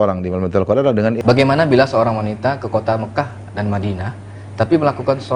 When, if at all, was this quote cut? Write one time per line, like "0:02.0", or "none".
0:01.2

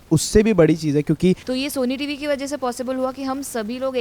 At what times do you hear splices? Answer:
0:01.5

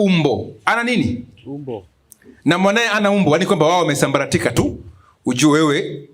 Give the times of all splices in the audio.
none

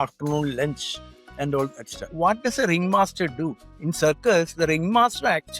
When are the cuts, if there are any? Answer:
0:02.1
0:03.7

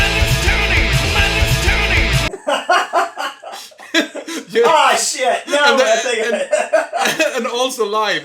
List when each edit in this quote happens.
none

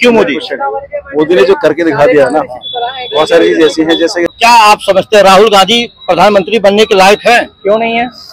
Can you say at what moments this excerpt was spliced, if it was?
0:04.2

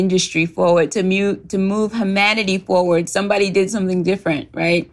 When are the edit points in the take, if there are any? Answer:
none

